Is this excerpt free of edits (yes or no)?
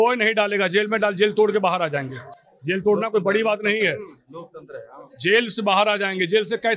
yes